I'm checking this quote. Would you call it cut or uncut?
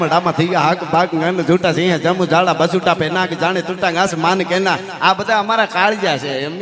uncut